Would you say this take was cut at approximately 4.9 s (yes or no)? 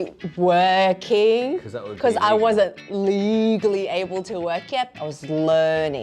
yes